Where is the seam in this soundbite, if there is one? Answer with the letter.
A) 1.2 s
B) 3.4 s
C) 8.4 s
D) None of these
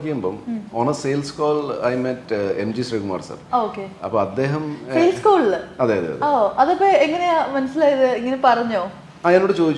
D